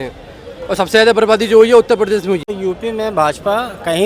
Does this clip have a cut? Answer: yes; 1 cut; at 2.5 s

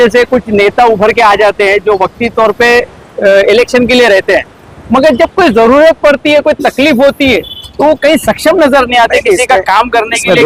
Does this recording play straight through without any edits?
yes; 0 cuts

